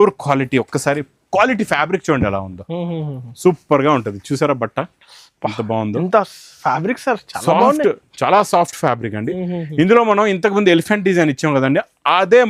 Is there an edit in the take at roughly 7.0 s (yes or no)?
no